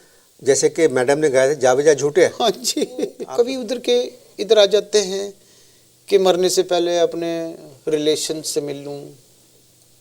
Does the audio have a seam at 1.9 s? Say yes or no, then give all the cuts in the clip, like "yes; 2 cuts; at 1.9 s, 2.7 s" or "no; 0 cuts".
no; 1 cut; at 3.2 s